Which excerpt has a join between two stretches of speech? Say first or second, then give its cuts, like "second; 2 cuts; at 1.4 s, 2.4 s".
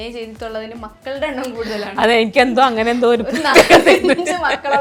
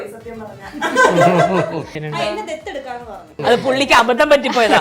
second; 2 cuts; at 2.0 s, 3.4 s